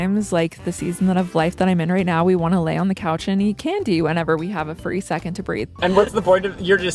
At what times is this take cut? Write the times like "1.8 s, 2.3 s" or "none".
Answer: 5.7 s